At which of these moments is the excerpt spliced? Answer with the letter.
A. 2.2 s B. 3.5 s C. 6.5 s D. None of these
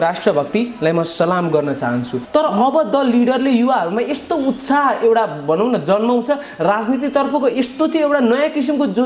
A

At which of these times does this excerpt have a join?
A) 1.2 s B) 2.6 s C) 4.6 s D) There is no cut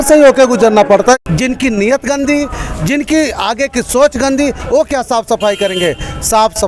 A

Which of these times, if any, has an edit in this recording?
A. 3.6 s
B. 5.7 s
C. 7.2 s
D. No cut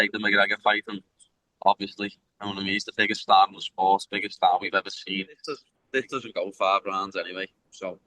B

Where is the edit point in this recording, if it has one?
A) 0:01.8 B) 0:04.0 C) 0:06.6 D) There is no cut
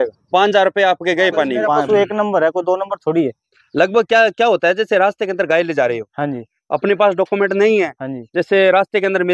A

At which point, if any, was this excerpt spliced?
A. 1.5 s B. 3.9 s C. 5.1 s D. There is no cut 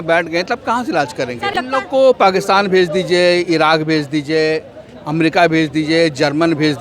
A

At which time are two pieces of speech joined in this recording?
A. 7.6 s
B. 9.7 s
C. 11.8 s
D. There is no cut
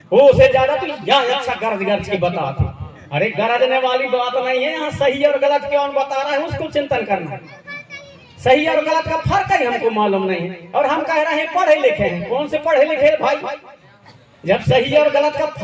D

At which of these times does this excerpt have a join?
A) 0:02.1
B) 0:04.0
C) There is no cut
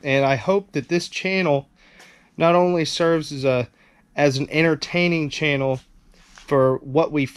C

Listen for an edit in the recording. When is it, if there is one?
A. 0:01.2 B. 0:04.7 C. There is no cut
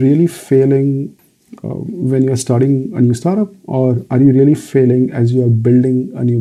A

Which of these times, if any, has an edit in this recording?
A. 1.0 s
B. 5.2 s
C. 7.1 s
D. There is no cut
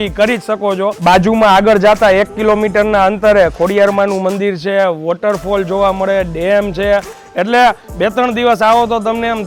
A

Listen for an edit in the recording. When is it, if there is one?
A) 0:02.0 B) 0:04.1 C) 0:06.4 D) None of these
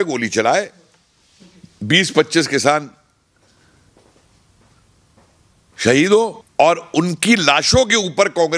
C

